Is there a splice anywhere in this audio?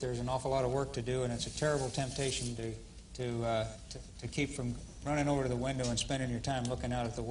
no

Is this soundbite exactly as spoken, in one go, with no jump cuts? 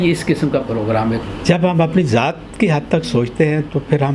no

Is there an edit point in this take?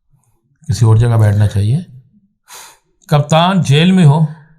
no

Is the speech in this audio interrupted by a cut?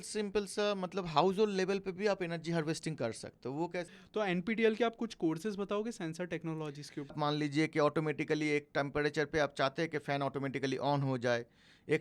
yes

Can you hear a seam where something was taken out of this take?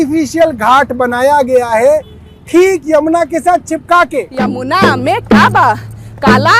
yes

